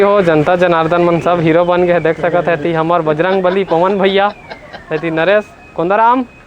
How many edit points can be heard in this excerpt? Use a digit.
0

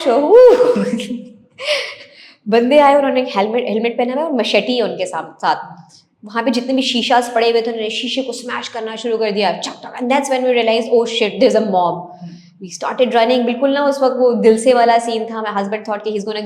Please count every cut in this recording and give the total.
0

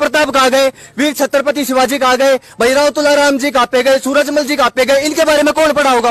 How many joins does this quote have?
0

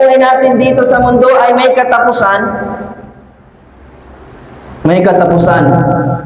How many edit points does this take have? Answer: 0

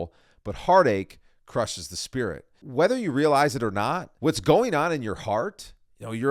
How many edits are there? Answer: 2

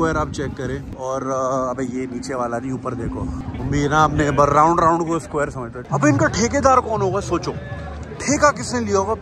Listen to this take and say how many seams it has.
3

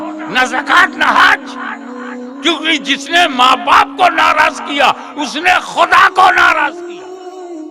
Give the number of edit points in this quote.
1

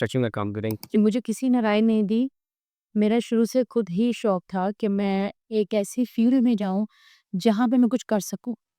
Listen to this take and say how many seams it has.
1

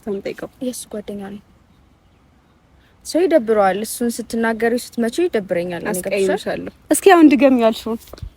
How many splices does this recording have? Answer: 1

